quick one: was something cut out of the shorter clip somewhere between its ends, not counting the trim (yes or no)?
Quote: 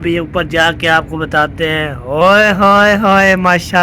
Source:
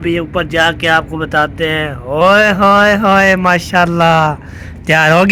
no